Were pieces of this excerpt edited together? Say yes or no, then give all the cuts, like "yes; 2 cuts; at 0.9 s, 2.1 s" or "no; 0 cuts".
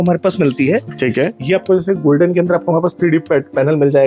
no; 0 cuts